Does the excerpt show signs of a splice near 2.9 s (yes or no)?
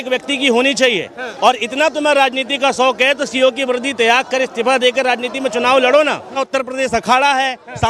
yes